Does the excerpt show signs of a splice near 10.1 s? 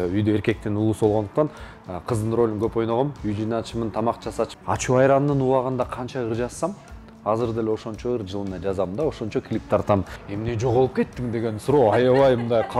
yes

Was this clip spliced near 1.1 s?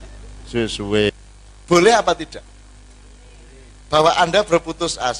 yes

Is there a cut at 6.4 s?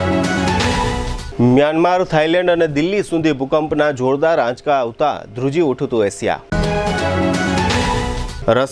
no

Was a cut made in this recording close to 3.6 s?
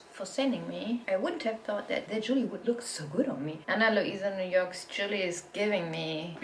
yes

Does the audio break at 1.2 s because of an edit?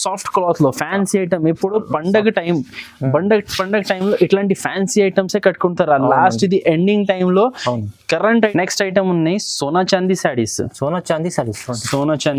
no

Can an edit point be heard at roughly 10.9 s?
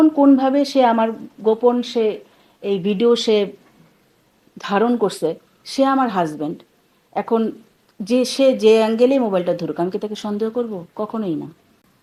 no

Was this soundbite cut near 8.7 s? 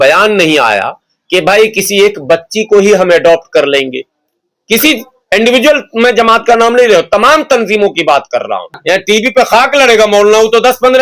yes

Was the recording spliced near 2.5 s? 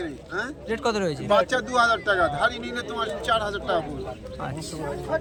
no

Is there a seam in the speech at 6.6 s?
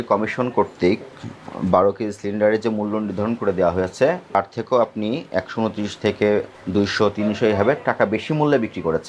yes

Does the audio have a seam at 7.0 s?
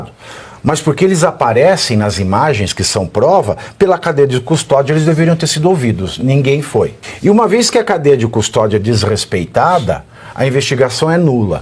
yes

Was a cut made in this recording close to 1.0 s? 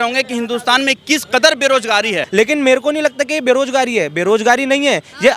no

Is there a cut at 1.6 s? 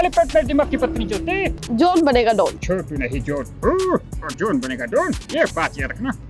yes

